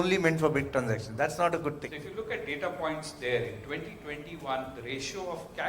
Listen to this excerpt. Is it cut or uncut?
cut